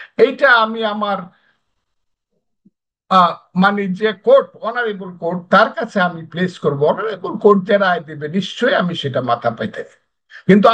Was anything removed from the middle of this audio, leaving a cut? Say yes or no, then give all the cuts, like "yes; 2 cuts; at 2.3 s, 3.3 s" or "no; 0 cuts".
no; 0 cuts